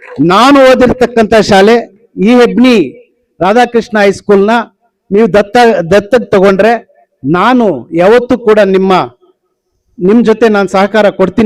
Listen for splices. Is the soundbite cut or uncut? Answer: uncut